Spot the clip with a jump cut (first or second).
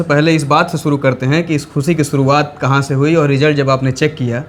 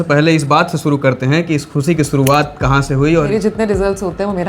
second